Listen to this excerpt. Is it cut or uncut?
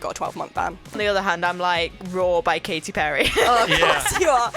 cut